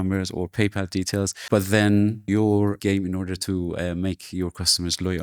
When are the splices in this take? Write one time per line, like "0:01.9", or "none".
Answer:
0:01.4
0:02.6